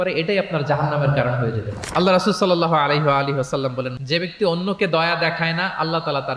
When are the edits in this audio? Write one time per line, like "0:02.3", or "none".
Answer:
0:03.9